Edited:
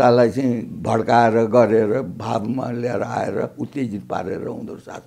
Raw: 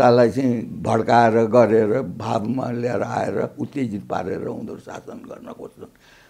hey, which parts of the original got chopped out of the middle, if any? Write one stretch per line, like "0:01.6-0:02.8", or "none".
none